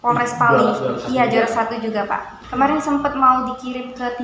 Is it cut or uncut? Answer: cut